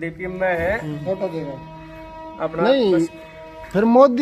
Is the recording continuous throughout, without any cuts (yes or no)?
yes